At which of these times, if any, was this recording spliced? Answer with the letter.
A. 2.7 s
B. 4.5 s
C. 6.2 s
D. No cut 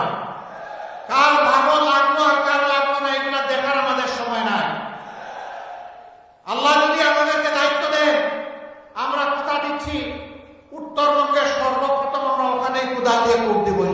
B